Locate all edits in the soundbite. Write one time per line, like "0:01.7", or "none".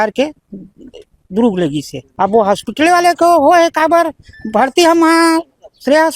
none